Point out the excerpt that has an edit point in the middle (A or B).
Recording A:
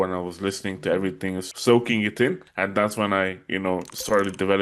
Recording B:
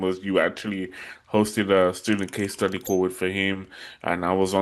A